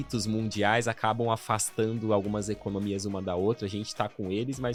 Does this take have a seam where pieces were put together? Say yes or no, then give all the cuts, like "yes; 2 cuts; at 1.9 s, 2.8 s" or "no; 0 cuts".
no; 0 cuts